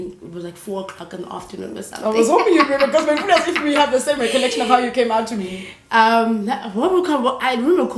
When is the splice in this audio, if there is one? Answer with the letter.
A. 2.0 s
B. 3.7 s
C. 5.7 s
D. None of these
D